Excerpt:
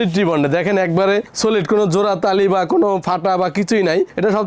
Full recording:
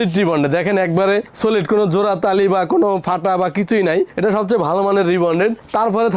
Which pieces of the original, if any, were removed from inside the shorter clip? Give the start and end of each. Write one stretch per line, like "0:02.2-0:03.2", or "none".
none